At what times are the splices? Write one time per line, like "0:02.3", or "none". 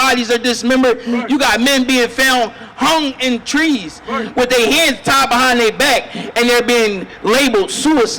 0:01.1